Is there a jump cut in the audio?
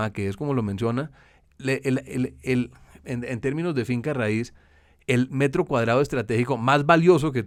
no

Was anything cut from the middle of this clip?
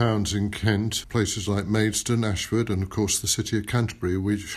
yes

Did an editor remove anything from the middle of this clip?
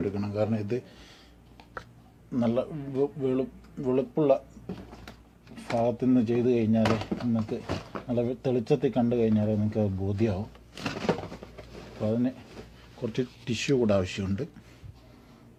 no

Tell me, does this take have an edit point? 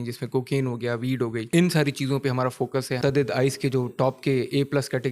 yes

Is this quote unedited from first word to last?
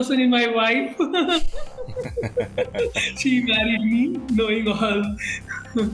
yes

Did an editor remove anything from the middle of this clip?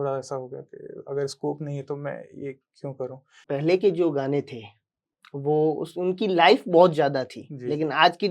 yes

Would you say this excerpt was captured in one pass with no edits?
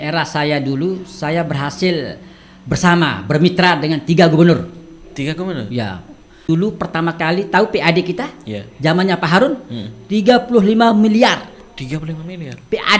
no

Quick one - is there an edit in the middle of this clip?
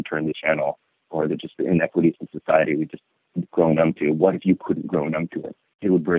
no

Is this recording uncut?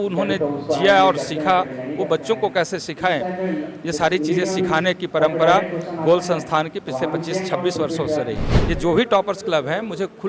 no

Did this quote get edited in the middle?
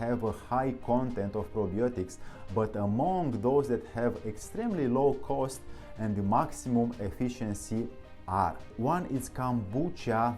yes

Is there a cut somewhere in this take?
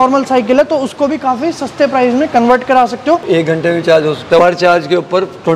yes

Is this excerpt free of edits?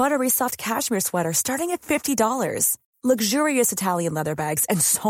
yes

